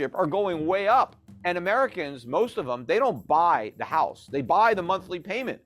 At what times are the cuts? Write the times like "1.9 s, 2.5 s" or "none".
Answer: 1.3 s